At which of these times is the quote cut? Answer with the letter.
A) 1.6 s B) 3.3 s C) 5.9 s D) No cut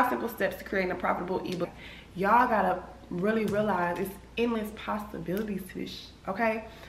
A